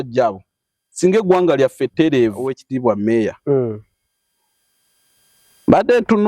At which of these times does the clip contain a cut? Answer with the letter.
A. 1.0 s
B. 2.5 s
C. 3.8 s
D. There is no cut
B